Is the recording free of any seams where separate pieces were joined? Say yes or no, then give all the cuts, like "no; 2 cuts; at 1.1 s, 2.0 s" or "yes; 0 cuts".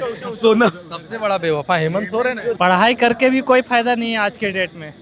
no; 1 cut; at 2.5 s